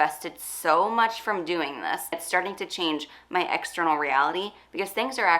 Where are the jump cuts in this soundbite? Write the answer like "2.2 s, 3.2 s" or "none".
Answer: 2.2 s